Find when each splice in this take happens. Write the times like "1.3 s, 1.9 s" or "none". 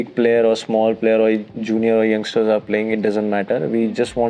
none